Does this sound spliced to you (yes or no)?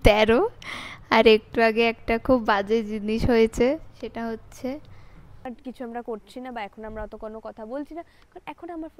yes